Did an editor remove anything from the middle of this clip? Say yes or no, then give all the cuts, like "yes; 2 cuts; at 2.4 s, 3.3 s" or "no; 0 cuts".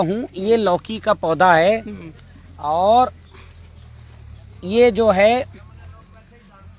no; 0 cuts